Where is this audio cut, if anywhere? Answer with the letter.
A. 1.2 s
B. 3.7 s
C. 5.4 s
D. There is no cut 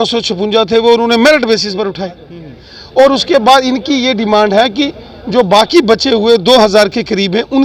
D